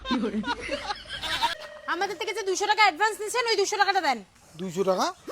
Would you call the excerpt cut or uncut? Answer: cut